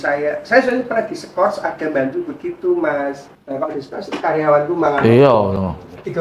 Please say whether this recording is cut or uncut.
uncut